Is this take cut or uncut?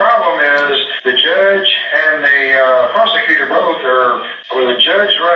cut